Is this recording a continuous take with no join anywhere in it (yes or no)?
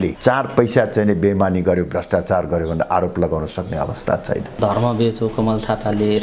no